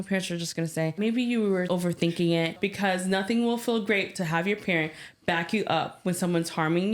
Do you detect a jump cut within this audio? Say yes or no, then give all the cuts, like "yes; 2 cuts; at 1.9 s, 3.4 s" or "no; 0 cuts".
yes; 3 cuts; at 1.0 s, 1.7 s, 2.6 s